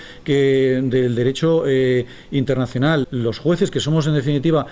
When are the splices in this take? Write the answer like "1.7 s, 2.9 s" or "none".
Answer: 3.1 s

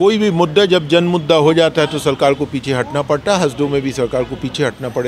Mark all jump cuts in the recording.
none

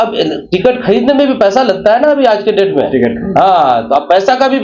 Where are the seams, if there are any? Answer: none

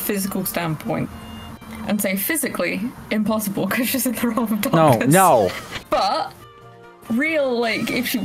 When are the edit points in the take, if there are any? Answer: 5.7 s

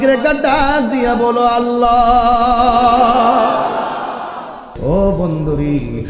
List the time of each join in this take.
4.6 s

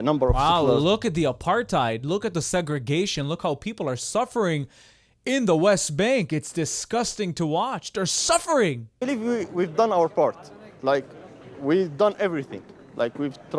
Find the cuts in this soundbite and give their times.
9.0 s

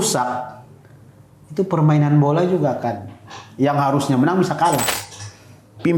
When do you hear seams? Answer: 5.0 s

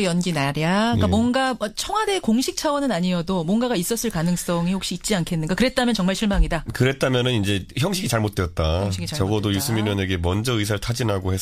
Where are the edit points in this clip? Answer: none

